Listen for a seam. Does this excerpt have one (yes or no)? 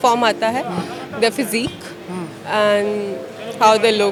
no